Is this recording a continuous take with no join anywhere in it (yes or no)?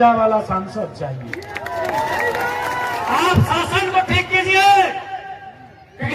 no